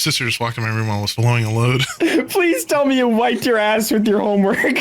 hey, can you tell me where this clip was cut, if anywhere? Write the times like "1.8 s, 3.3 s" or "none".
1.1 s, 1.9 s